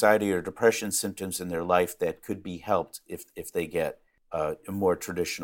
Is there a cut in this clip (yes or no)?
yes